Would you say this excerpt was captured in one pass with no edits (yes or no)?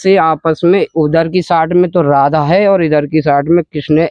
yes